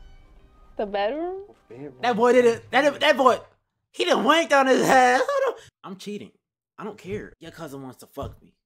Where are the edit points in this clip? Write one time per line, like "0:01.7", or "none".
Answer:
0:05.7
0:07.3